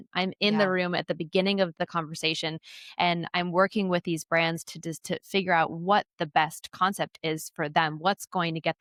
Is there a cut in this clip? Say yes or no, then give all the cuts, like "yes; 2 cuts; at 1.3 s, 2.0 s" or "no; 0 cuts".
no; 0 cuts